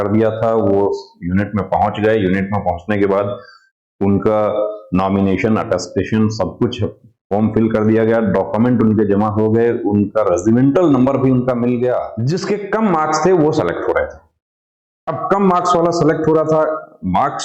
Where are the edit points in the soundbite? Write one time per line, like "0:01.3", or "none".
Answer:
0:12.2